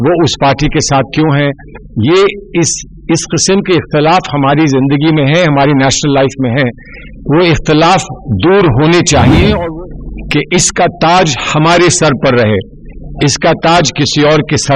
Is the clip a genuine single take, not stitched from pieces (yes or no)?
no